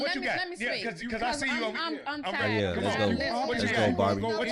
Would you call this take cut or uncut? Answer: uncut